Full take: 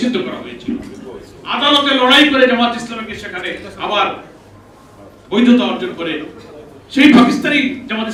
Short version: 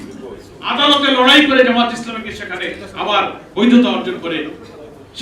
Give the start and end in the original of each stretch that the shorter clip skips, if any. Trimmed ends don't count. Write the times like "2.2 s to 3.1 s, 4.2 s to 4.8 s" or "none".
4.2 s to 5.2 s